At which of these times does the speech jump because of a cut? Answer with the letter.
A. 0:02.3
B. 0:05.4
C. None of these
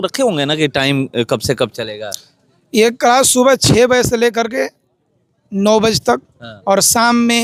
C